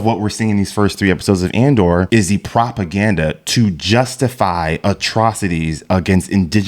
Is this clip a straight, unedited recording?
no; 1 cut; at 2.1 s

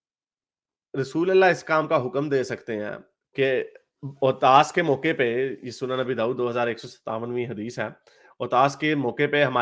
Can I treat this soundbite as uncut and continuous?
yes; 0 cuts

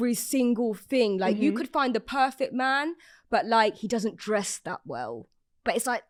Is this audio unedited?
yes; 0 cuts

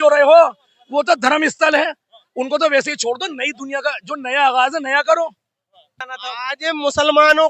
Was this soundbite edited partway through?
yes; 1 cut; at 6.1 s

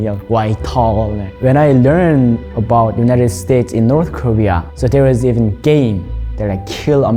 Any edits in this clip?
yes; 2 cuts; at 1.3 s, 4.7 s

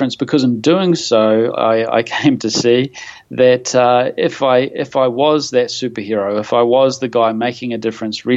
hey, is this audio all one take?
yes; 0 cuts

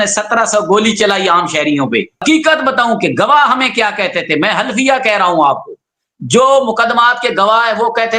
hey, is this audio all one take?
no; 1 cut; at 2.1 s

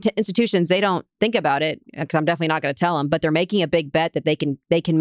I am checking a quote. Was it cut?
no; 0 cuts

